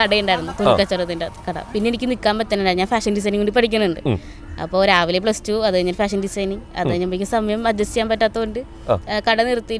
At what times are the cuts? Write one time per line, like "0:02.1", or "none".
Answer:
0:01.7